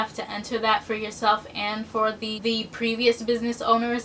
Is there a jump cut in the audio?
yes; 1 cut; at 2.4 s

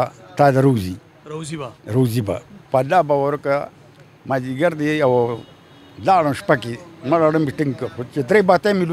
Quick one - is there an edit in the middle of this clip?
no; 0 cuts

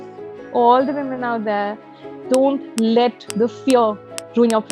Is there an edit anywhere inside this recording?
yes; 1 cut; at 3.2 s

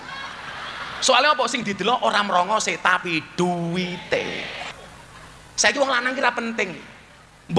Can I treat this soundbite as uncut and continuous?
no; 1 cut; at 4.8 s

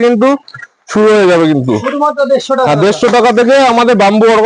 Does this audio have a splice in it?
no; 0 cuts

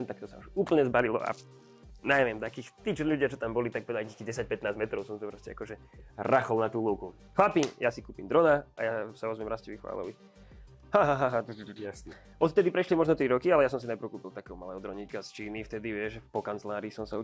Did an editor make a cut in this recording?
yes; 1 cut; at 7.2 s

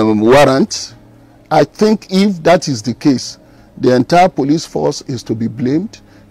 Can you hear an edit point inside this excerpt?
no; 0 cuts

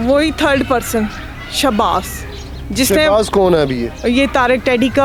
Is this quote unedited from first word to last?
yes; 0 cuts

